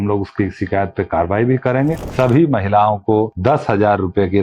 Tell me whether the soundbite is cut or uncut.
cut